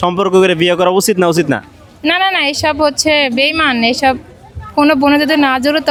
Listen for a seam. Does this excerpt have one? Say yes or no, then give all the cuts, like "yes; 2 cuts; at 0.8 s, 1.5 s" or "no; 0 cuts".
no; 0 cuts